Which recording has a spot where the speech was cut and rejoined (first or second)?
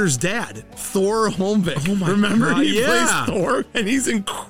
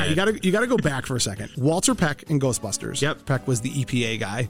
second